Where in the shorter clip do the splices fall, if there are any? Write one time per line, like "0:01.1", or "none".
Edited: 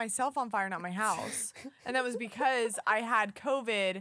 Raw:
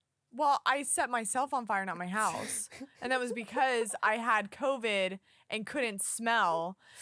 none